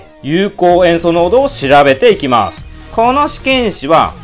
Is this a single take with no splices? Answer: yes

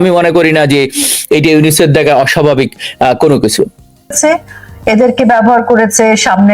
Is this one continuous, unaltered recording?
no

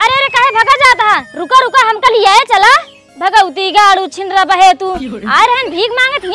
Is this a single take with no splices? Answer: yes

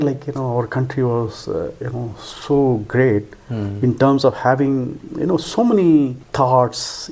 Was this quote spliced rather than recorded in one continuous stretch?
yes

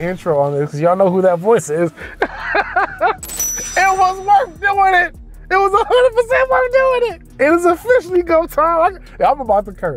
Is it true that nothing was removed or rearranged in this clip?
no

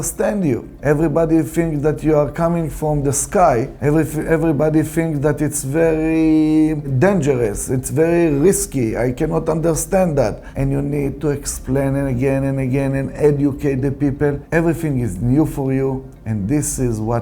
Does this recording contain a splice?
yes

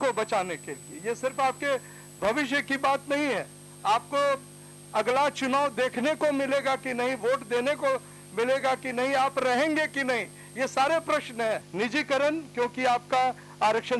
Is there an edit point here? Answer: yes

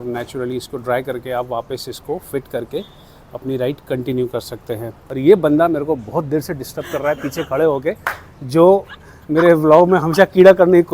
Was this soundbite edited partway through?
yes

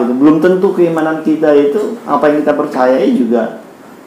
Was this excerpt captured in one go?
yes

